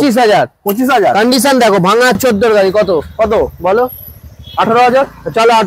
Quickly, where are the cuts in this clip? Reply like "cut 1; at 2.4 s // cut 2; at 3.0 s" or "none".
cut 1; at 2.2 s